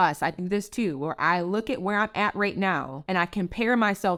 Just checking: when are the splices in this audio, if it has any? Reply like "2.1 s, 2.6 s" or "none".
none